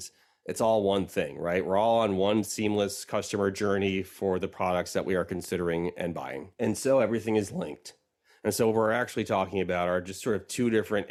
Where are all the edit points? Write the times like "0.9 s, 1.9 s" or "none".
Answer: none